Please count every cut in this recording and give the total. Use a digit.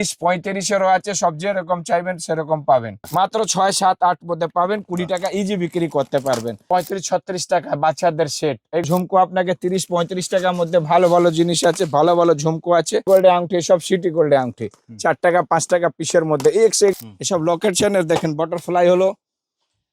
5